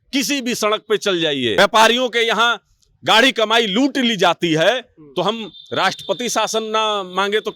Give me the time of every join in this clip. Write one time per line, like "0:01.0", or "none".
0:01.5